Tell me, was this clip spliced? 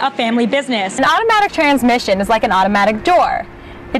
yes; 1 cut; at 0.9 s

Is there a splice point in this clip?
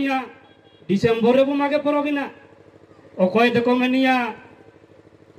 no; 0 cuts

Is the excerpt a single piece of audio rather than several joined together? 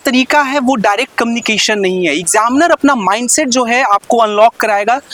yes; 0 cuts

